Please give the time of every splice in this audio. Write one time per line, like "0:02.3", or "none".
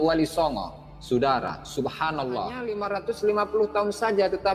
0:02.8